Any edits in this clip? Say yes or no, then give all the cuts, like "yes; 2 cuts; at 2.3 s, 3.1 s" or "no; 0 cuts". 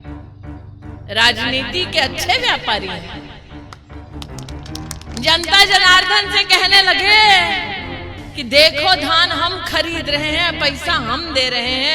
yes; 3 cuts; at 1.0 s, 3.1 s, 4.8 s